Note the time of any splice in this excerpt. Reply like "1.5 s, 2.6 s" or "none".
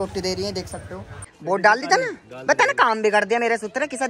1.3 s